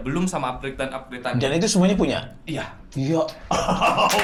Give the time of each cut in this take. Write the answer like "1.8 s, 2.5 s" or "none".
none